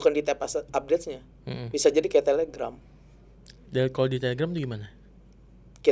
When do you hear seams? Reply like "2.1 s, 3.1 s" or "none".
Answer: none